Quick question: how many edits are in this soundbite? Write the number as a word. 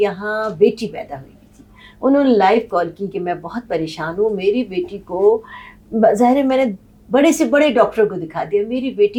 zero